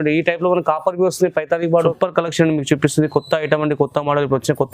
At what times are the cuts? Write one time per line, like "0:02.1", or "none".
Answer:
0:01.9